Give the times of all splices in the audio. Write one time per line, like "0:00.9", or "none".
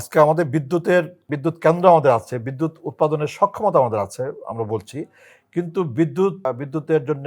0:01.3
0:06.4